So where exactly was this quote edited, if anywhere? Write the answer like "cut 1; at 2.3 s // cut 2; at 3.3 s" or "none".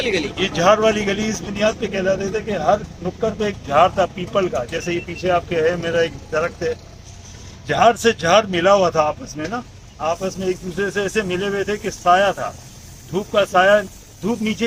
none

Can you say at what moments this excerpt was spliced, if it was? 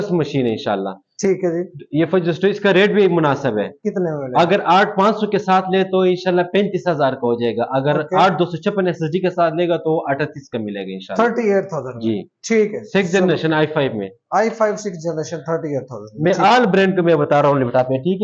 none

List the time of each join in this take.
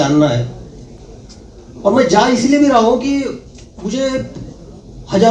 none

